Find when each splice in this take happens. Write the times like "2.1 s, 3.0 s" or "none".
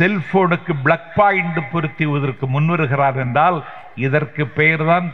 none